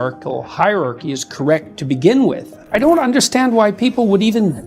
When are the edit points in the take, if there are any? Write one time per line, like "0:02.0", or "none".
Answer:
0:02.5